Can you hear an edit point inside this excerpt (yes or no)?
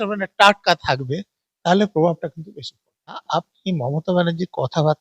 yes